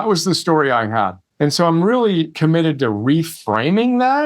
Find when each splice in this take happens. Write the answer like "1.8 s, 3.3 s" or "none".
1.2 s, 2.3 s